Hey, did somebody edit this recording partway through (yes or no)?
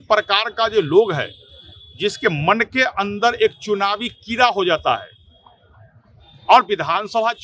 no